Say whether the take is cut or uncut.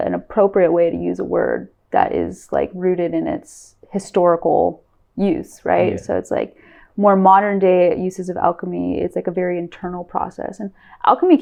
uncut